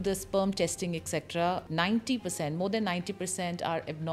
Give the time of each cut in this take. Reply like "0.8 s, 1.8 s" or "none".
1.6 s

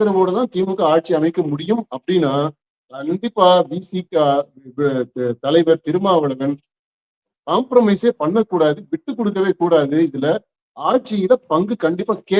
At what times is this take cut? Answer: none

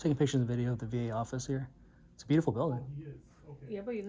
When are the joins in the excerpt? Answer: none

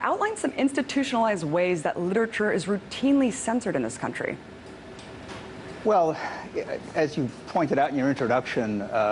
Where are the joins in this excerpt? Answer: 6.6 s

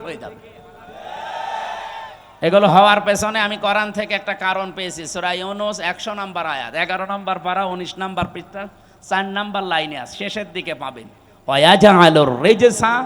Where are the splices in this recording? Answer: none

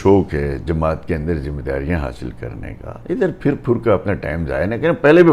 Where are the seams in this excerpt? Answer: none

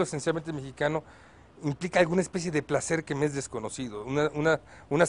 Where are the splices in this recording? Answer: none

